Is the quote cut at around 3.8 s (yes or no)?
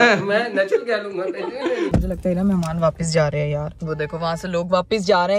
yes